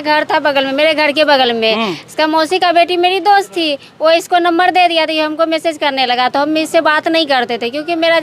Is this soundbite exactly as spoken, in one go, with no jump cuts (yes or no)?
yes